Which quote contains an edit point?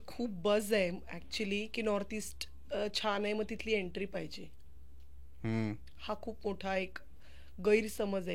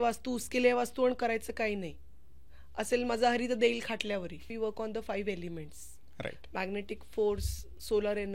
second; 1 cut; at 4.5 s

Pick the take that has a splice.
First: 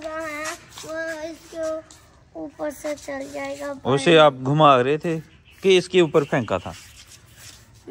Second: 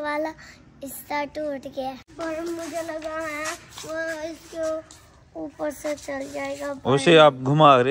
second; 1 cut; at 2.1 s

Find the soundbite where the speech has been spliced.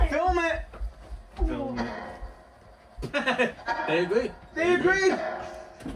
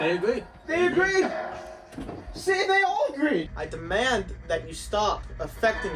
second; 1 cut; at 3.5 s

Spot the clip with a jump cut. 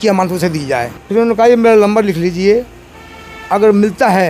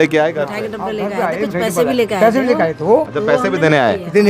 first; 1 cut; at 1.0 s

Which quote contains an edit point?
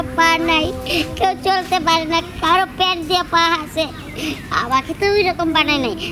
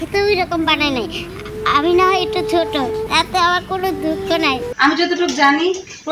second; 2 cuts; at 3.1 s, 4.7 s

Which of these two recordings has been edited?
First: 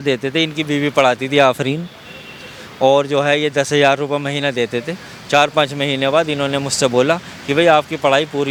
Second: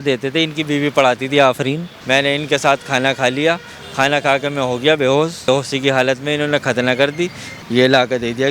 second; 3 cuts; at 1.9 s, 5.5 s, 7.5 s

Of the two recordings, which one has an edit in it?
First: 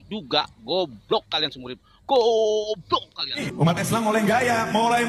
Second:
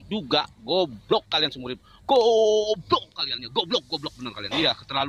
first; 1 cut; at 3.4 s

